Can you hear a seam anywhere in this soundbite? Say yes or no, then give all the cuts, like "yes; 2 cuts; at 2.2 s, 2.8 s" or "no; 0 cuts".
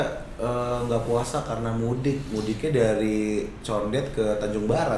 no; 0 cuts